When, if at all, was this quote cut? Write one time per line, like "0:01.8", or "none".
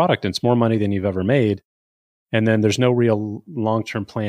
none